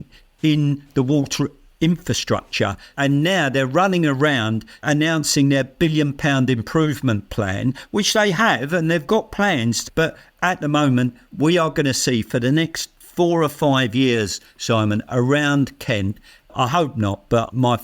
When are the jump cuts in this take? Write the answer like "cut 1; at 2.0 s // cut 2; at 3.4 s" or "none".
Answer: cut 1; at 2.8 s

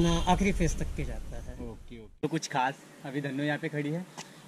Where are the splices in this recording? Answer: cut 1; at 2.2 s

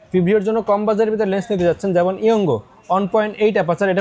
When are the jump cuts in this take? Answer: none

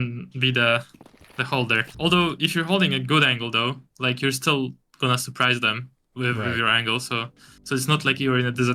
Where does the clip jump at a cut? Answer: cut 1; at 1.9 s

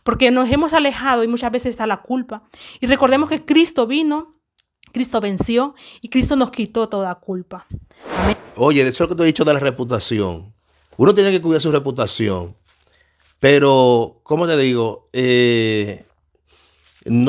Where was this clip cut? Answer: cut 1; at 8.3 s

